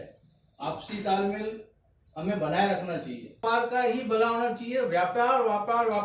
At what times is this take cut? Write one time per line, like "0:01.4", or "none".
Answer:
0:03.4